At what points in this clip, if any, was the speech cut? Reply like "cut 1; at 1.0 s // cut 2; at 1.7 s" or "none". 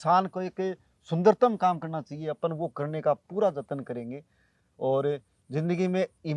none

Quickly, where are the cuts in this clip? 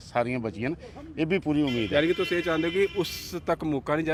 none

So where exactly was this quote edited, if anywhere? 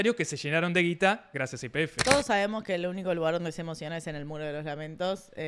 cut 1; at 1.9 s

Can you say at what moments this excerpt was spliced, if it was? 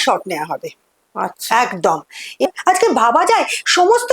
cut 1; at 2.5 s

